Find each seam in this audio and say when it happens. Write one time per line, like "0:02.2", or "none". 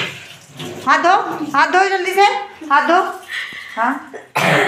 none